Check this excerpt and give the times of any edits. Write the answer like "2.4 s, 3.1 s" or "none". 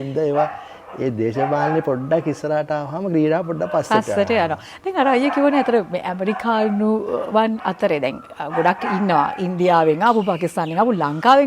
none